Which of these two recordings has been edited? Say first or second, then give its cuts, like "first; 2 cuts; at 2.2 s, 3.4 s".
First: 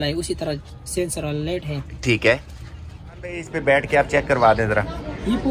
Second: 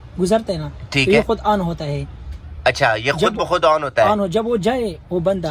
first; 1 cut; at 3.5 s